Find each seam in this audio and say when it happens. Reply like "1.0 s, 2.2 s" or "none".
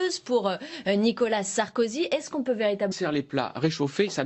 none